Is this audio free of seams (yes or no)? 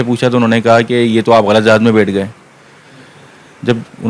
yes